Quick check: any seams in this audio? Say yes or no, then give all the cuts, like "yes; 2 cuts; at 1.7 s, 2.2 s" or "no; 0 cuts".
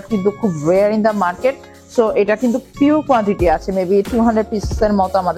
no; 0 cuts